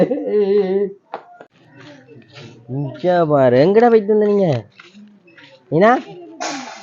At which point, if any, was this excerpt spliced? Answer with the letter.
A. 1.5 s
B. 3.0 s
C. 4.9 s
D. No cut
A